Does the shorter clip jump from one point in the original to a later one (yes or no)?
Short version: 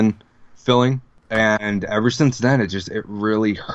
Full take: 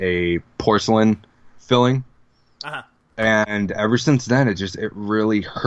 yes